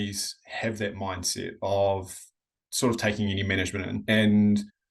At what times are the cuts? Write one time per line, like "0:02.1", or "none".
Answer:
0:04.0